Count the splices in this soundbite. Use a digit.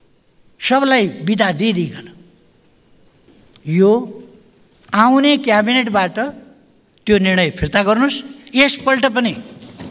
1